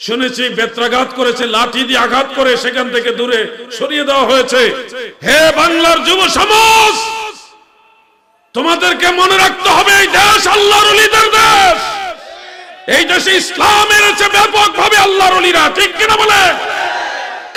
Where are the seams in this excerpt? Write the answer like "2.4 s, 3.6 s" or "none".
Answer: none